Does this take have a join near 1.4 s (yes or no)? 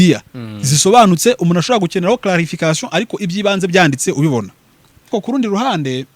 no